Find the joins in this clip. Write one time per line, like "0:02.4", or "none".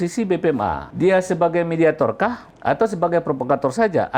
0:00.9
0:02.5

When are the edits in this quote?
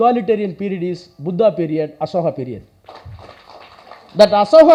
none

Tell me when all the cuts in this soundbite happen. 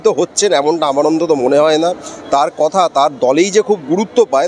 none

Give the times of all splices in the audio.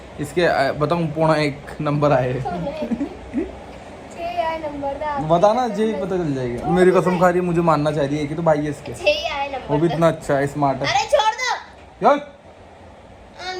none

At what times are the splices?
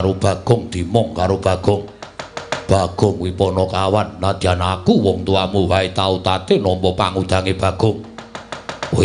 none

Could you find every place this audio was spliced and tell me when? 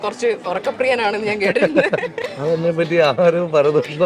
0:02.1

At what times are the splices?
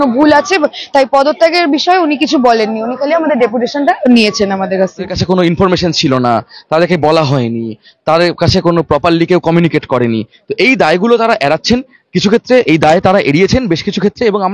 0:05.2

